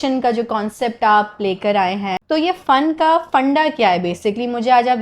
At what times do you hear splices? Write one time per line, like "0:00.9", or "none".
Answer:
0:02.2